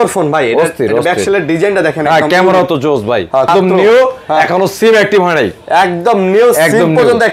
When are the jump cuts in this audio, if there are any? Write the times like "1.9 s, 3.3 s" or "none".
3.5 s